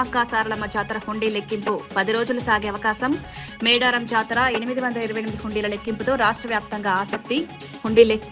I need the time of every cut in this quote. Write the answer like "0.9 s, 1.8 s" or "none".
none